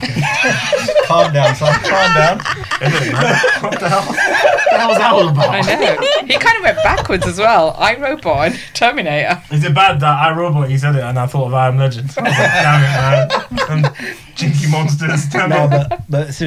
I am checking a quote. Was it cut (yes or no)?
no